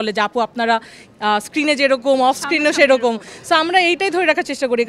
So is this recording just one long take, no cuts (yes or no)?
yes